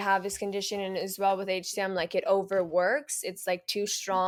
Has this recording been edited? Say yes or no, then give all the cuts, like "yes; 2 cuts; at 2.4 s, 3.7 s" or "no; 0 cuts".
no; 0 cuts